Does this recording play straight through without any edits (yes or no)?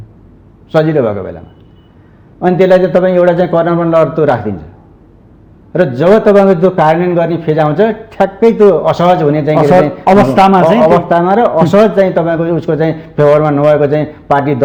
yes